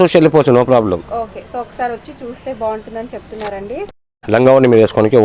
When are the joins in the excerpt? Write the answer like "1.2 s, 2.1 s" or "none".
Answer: 3.9 s